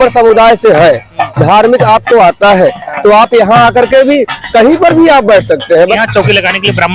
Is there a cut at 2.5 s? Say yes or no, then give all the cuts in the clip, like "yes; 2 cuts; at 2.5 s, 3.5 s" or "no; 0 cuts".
no; 1 cut; at 5.9 s